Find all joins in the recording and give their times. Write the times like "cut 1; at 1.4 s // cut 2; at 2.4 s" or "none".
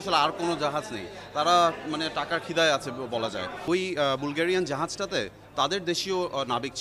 cut 1; at 3.6 s